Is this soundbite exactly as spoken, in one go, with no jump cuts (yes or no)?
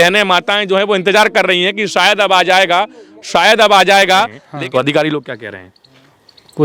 no